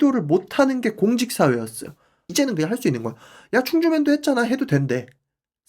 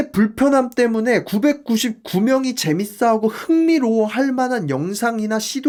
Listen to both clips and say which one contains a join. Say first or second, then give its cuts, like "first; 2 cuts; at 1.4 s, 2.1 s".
first; 1 cut; at 2.3 s